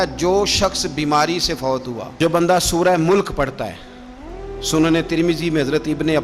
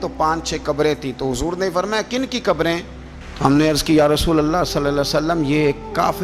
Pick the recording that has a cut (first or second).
first